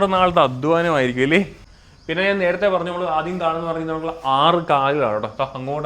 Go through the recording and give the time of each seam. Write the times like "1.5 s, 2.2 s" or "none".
1.6 s